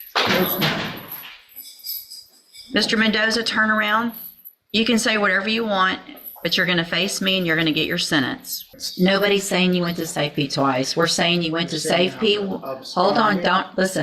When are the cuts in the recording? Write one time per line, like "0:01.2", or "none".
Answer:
0:08.8